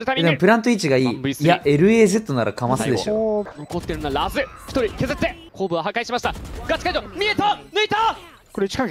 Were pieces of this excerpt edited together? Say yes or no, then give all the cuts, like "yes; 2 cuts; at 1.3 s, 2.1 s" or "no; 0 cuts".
yes; 2 cuts; at 3.5 s, 5.4 s